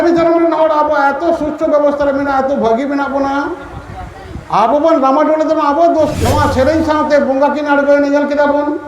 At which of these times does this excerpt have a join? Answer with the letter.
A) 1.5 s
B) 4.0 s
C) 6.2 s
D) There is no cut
C